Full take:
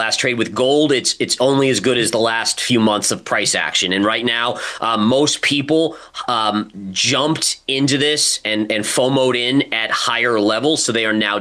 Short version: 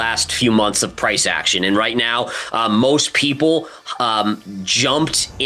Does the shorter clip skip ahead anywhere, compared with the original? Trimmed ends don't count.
no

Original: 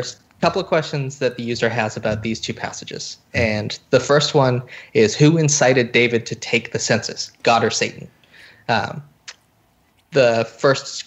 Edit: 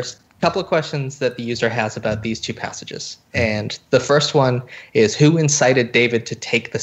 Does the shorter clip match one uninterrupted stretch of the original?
yes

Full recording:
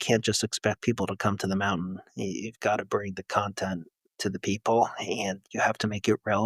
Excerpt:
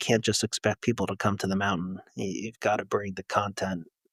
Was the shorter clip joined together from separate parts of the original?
no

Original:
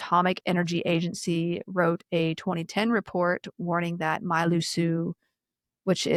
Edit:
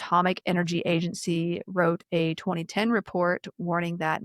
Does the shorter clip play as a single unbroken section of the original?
yes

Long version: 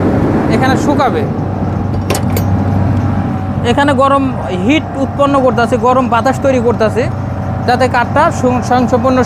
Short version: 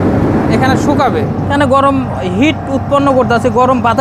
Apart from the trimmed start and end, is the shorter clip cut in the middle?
yes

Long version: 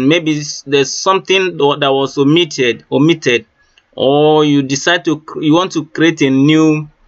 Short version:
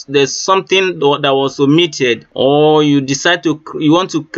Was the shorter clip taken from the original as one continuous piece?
no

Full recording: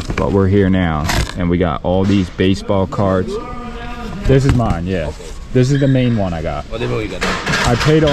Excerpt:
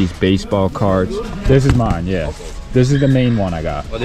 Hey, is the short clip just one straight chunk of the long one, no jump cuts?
no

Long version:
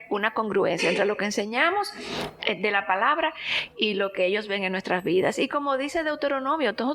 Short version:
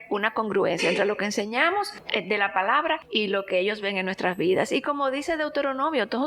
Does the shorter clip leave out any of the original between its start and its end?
yes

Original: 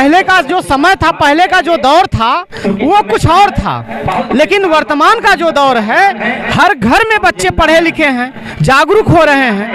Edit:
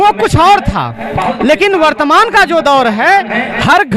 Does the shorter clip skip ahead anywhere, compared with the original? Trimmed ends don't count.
no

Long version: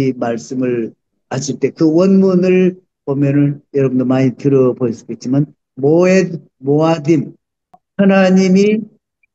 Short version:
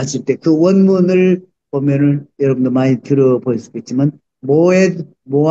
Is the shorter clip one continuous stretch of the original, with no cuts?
yes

